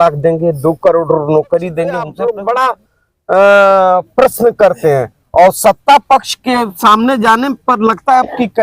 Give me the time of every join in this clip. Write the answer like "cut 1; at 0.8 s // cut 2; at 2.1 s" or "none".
cut 1; at 2.1 s